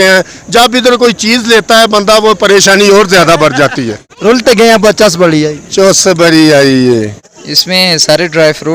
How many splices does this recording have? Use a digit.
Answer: 0